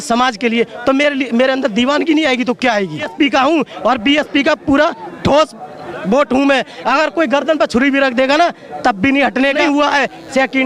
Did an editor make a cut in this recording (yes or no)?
yes